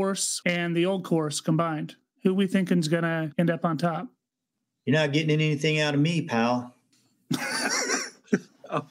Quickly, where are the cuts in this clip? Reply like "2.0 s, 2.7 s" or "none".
none